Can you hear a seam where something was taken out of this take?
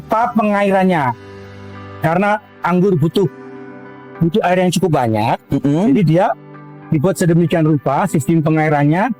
yes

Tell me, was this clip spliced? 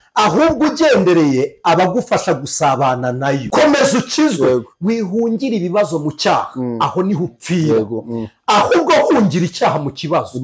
yes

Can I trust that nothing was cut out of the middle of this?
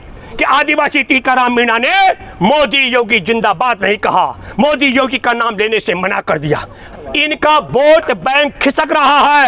no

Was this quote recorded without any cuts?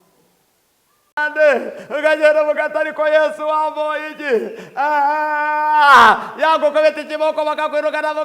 no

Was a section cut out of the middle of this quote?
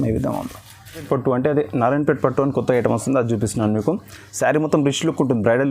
yes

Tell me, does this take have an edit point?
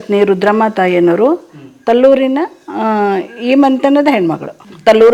no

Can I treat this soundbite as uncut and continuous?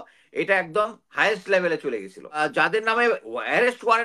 no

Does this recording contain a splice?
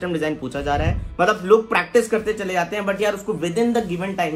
yes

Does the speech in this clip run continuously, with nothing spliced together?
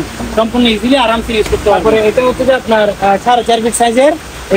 no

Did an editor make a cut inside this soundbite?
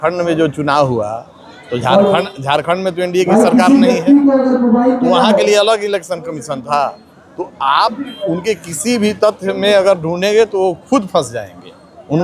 no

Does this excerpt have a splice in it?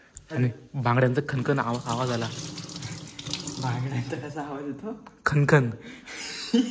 no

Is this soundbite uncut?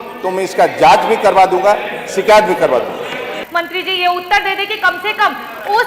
no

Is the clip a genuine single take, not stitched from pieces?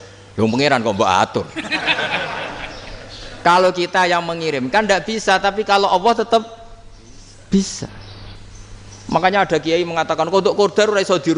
yes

